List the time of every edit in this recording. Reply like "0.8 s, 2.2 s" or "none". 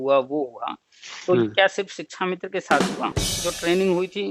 3.3 s